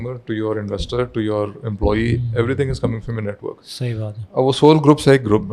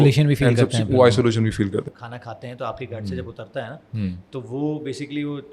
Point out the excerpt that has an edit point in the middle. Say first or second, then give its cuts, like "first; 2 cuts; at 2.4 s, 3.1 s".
second; 1 cut; at 1.9 s